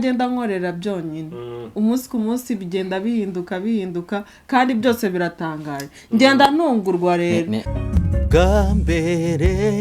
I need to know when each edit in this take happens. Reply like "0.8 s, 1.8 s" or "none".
7.6 s